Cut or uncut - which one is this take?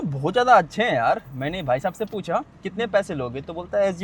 cut